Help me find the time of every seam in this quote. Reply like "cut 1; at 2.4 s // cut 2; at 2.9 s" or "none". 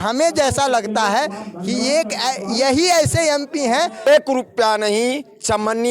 cut 1; at 4.1 s